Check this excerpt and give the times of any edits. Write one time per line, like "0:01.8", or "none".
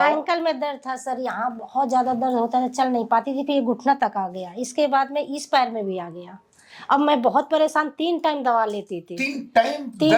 none